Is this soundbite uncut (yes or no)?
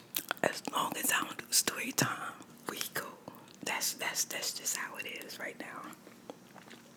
yes